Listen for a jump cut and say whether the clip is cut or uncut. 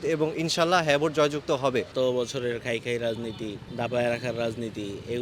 cut